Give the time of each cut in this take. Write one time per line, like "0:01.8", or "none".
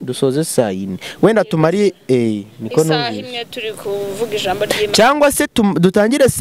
none